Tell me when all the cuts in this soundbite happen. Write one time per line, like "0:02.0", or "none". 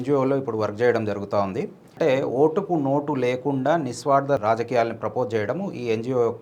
0:01.9
0:04.4